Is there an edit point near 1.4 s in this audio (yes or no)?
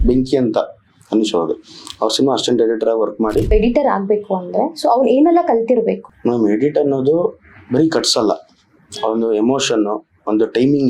no